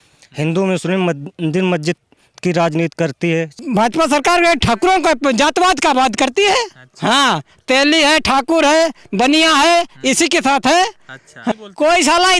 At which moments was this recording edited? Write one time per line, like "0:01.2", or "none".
0:03.5
0:11.5